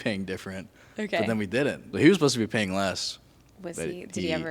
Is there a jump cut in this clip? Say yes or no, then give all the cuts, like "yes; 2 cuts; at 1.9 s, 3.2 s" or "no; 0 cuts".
yes; 1 cut; at 1.8 s